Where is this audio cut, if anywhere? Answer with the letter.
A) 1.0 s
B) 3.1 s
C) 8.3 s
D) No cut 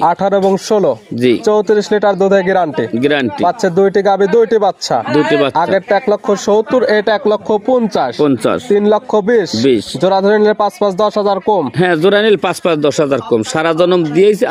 D